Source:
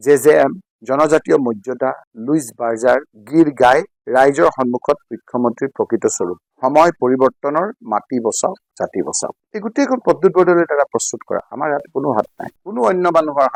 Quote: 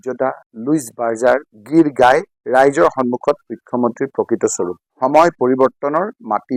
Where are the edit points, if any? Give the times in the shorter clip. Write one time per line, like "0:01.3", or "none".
none

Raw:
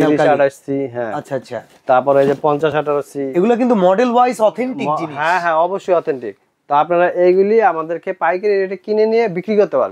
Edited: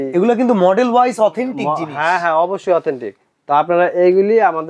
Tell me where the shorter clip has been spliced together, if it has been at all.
none

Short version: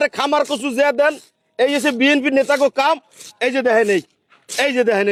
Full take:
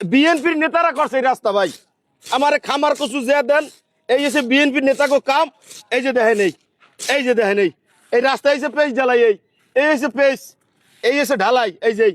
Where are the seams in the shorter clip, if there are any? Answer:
none

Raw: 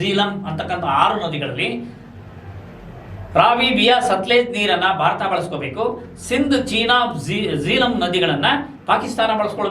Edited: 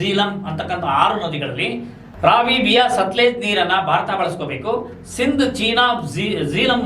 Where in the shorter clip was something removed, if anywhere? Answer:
0:02.0

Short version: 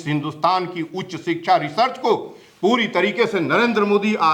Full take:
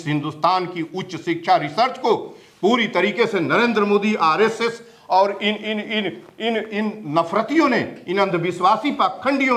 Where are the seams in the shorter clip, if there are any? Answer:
none

